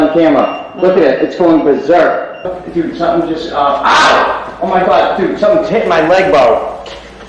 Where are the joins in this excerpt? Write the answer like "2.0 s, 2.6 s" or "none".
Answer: 2.6 s